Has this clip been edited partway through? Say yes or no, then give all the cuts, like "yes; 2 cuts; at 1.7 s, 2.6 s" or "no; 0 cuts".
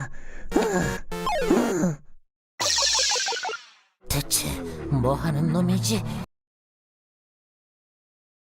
no; 0 cuts